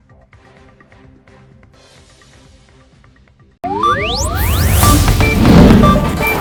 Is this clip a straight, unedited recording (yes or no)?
yes